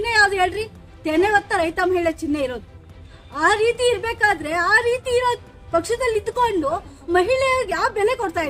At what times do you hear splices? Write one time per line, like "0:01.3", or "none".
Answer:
none